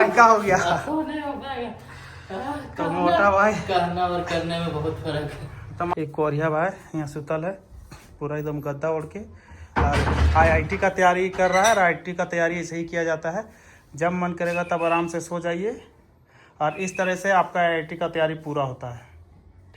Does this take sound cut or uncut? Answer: cut